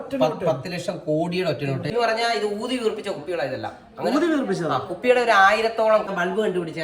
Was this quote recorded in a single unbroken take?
no; 2 cuts; at 1.9 s, 6.1 s

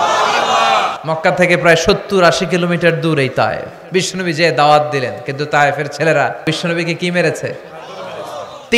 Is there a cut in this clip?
yes; 3 cuts; at 0.9 s, 3.7 s, 6.4 s

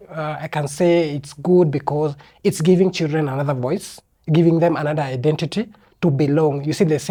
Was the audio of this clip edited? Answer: no; 0 cuts

